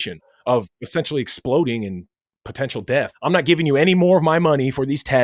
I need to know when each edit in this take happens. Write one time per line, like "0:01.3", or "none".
0:03.1